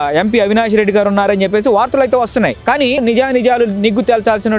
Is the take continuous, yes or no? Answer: no